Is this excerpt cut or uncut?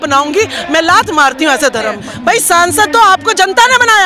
cut